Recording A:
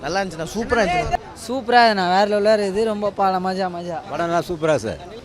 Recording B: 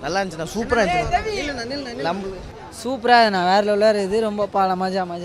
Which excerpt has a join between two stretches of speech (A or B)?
A